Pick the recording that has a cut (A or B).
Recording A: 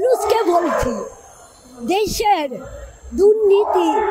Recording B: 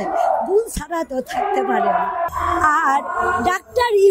B